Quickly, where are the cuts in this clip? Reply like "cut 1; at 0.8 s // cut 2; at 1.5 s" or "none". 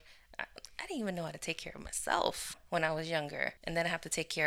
cut 1; at 2.5 s // cut 2; at 3.6 s